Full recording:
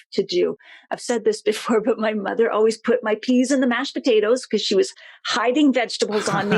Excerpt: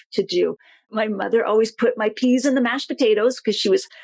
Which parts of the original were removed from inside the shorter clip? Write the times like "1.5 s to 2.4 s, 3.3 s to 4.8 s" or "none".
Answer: 0.9 s to 2.0 s